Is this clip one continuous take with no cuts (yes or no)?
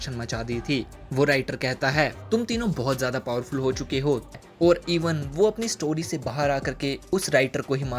no